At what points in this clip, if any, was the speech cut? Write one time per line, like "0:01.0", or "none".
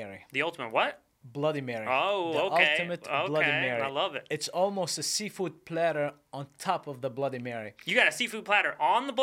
none